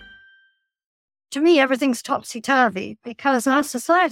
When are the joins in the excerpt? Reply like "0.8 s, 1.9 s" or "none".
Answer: 1.2 s